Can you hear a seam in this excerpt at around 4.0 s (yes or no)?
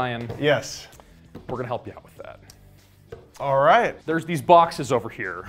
yes